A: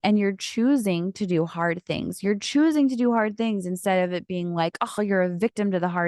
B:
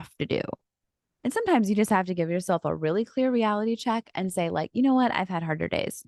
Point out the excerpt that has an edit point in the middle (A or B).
B